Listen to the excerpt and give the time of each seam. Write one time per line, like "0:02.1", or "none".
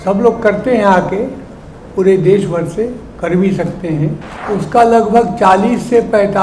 0:04.3